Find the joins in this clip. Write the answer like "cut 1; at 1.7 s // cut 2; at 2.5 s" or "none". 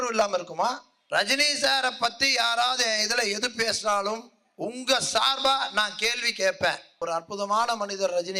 cut 1; at 0.9 s // cut 2; at 7.0 s